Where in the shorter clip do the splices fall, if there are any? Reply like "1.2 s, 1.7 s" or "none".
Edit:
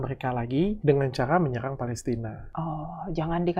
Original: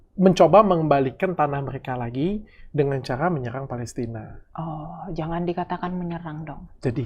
0.8 s, 2.4 s